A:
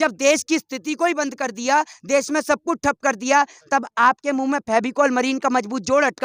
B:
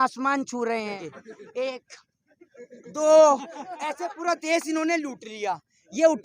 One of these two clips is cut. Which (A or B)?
B